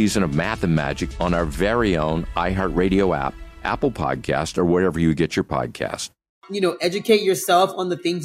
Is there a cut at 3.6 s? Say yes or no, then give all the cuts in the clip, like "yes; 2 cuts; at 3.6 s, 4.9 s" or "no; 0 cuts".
no; 1 cut; at 6.4 s